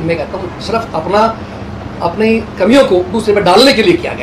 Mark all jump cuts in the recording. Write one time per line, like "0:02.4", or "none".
none